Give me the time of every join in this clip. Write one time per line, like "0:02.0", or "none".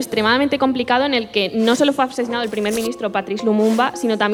none